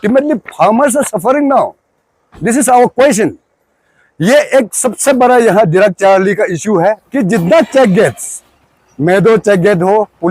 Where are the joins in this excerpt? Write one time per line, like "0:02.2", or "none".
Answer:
0:07.0

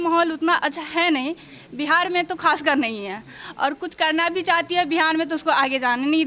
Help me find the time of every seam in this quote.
none

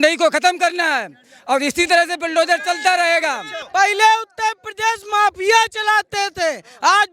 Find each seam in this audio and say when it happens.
0:03.5

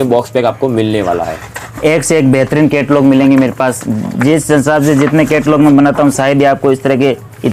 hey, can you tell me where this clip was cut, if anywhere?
none

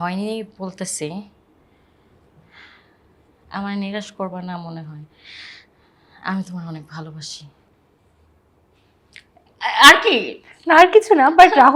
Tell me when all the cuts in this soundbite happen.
none

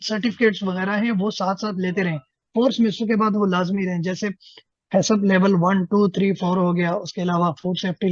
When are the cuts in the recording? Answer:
none

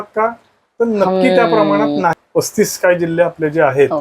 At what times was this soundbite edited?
0:02.2

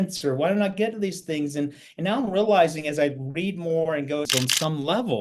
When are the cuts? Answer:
0:04.3

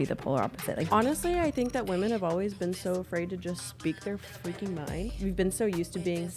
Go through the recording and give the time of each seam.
0:00.8
0:05.1

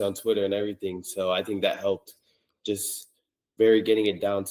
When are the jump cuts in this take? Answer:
none

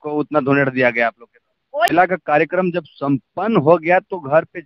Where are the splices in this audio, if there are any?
0:01.9

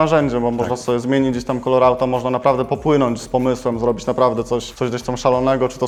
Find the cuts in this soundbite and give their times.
none

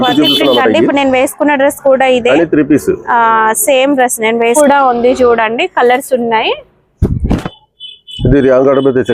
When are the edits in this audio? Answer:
0:04.6

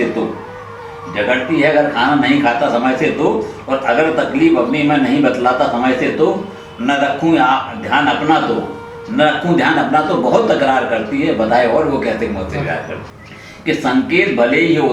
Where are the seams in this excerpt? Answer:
0:13.0

